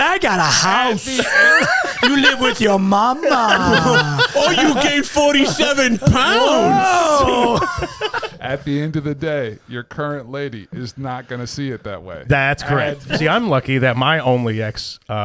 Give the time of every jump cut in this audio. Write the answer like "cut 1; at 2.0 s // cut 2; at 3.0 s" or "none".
cut 1; at 13.0 s